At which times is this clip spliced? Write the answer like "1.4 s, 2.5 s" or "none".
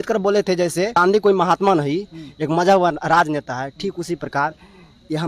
0.9 s